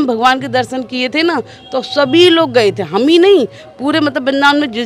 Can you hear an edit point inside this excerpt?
no; 0 cuts

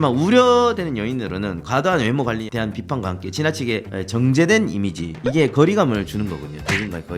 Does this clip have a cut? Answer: no; 0 cuts

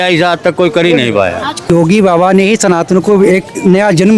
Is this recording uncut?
no; 1 cut; at 1.7 s

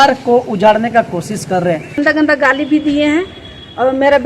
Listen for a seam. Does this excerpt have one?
yes; 1 cut; at 2.0 s

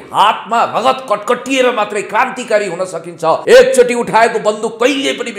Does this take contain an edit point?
yes; 1 cut; at 3.4 s

